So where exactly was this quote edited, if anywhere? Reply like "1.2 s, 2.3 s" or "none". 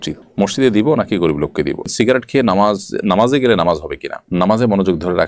1.9 s, 4.2 s